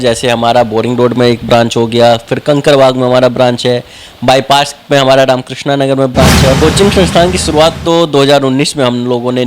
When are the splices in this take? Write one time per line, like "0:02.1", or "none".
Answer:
0:06.6